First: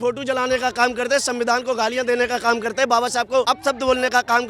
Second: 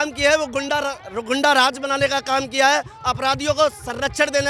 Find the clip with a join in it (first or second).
first